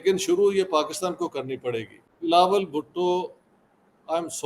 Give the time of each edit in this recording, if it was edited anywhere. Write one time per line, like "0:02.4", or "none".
0:02.1

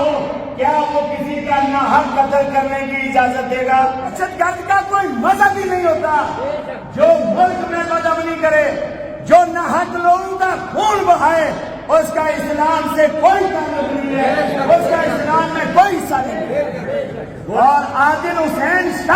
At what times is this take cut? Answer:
0:04.1
0:17.4

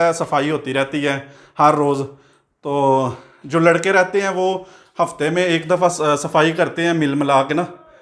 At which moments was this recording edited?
none

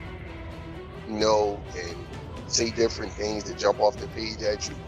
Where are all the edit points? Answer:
none

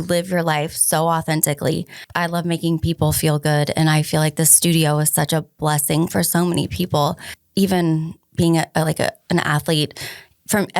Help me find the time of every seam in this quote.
0:02.0
0:07.3

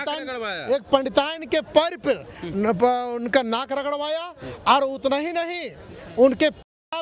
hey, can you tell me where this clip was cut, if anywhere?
none

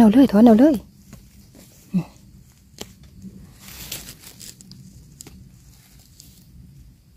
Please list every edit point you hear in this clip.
none

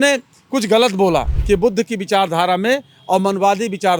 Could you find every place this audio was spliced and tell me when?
0:01.3

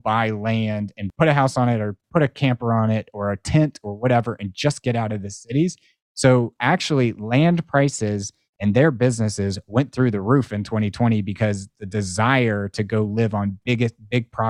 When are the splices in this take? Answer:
0:01.0

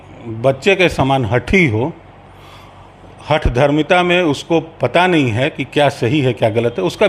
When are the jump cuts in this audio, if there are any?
none

